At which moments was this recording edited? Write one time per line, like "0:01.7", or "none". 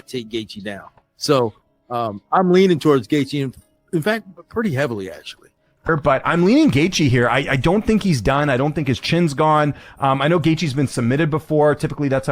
0:02.7
0:05.9